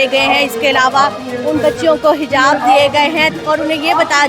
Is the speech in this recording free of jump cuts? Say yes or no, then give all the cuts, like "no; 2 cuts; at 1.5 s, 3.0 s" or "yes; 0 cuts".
yes; 0 cuts